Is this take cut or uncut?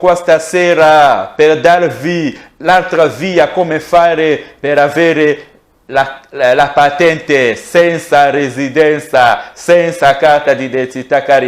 uncut